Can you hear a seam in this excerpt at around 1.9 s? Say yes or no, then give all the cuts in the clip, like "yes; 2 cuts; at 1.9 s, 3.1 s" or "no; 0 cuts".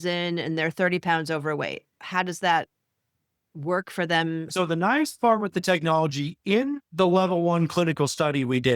yes; 2 cuts; at 1.9 s, 4.5 s